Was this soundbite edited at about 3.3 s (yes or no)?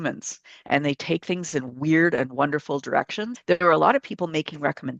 yes